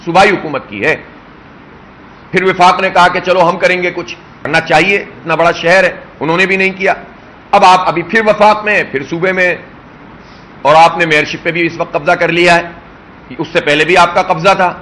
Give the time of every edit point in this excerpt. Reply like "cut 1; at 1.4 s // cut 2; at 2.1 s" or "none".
cut 1; at 4.5 s